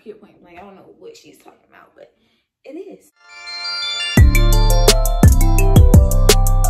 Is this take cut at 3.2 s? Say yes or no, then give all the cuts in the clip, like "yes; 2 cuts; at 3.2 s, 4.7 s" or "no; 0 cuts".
yes; 1 cut; at 3.2 s